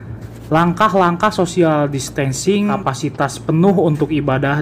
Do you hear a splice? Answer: yes; 1 cut; at 2.8 s

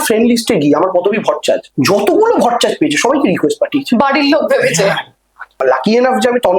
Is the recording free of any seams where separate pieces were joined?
no; 1 cut; at 5.5 s

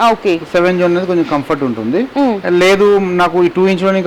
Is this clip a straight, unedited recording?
yes; 0 cuts

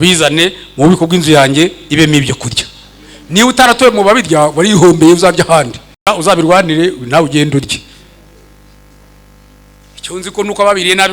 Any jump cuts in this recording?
yes; 1 cut; at 6.1 s

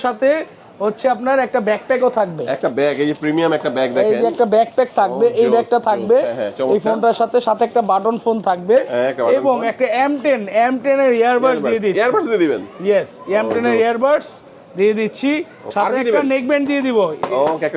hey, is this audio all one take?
no; 1 cut; at 15.8 s

